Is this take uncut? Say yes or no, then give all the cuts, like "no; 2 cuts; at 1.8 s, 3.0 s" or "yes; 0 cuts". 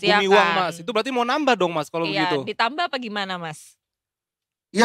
yes; 0 cuts